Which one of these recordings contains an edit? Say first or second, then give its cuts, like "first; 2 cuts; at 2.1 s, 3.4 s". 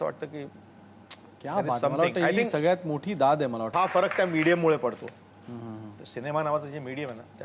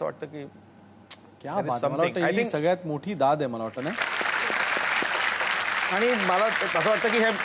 first; 1 cut; at 3.7 s